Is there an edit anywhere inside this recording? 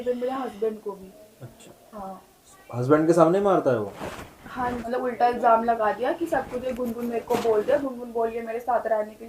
yes; 1 cut; at 4.8 s

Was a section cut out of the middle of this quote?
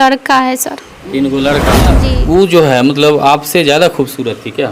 yes; 1 cut; at 1.9 s

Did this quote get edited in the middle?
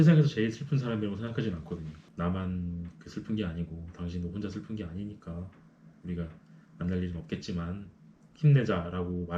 yes; 1 cut; at 2.0 s

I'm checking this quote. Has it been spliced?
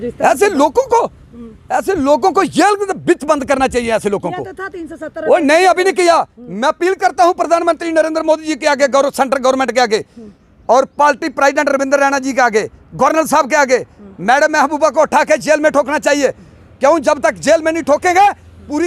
no; 0 cuts

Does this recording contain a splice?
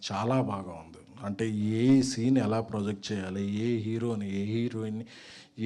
no; 0 cuts

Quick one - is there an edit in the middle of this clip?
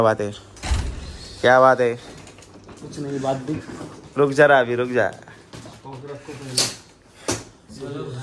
no; 0 cuts

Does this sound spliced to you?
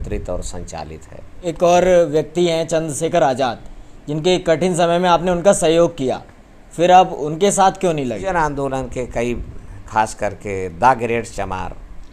yes; 2 cuts; at 1.4 s, 8.2 s

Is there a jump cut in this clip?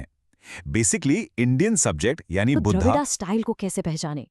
yes; 1 cut; at 2.7 s

